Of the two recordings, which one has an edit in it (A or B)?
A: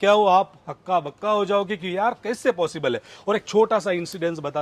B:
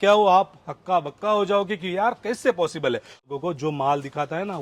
B